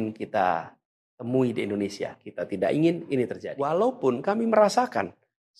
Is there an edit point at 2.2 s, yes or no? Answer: no